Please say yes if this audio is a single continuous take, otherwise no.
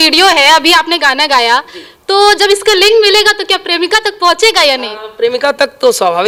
yes